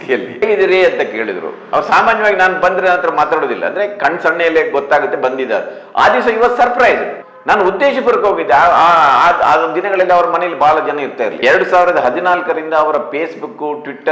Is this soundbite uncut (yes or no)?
no